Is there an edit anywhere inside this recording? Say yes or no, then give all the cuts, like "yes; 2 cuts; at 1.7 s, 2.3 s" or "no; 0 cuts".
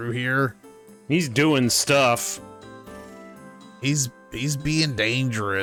no; 0 cuts